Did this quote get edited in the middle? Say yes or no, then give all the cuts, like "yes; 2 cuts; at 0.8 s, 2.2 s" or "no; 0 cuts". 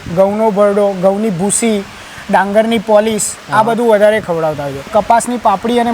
yes; 1 cut; at 4.9 s